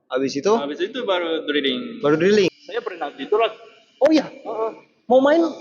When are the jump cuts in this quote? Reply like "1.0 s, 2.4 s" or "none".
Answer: 2.5 s